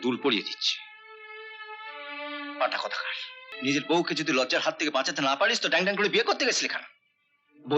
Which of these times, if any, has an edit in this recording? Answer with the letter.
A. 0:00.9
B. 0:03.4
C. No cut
B